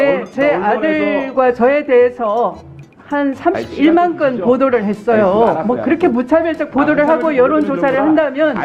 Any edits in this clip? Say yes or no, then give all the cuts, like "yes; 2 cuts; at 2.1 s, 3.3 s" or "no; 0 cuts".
no; 0 cuts